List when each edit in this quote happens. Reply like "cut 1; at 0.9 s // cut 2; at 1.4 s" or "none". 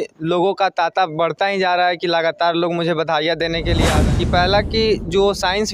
cut 1; at 3.9 s